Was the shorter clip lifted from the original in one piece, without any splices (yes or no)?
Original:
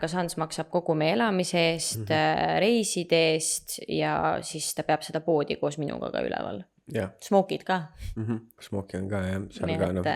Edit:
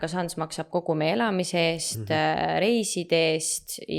yes